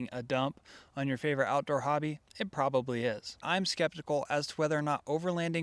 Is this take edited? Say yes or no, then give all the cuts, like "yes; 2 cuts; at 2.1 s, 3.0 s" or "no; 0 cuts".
yes; 2 cuts; at 2.2 s, 3.4 s